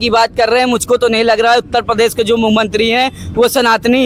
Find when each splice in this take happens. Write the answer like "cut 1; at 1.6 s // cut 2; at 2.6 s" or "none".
none